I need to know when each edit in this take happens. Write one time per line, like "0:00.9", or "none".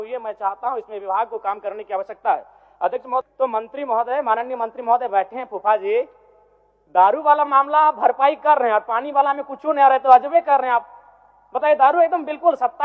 0:03.2